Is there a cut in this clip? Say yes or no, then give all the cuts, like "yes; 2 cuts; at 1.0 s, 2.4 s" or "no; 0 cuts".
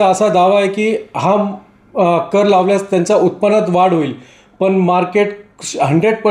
no; 0 cuts